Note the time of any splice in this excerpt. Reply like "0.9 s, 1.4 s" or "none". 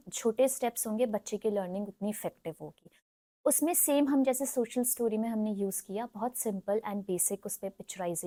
none

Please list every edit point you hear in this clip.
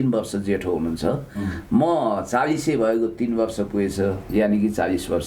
none

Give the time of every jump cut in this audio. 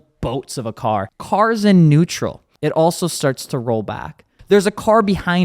1.1 s, 2.5 s, 4.3 s

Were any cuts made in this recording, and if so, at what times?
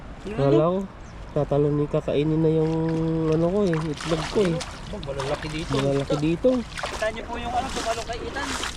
6.9 s

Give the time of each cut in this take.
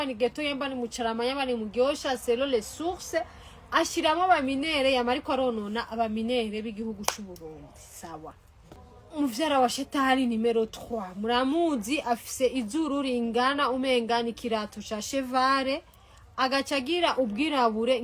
8.8 s

